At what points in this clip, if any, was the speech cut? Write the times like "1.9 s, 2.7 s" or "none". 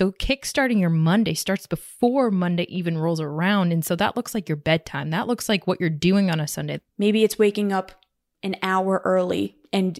6.6 s